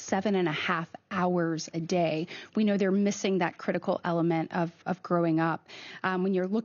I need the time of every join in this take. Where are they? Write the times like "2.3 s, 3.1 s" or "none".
none